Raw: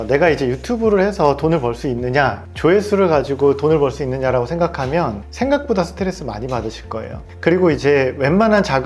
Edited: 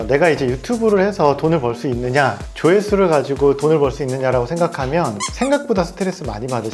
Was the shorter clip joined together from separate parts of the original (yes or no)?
no